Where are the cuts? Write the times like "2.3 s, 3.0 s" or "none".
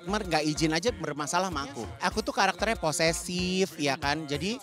1.9 s